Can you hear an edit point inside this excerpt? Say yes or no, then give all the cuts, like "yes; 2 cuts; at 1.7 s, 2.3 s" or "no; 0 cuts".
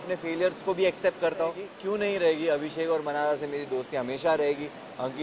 yes; 1 cut; at 1.7 s